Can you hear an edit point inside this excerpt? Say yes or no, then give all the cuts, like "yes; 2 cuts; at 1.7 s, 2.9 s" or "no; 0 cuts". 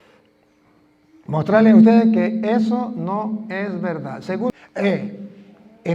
yes; 1 cut; at 4.5 s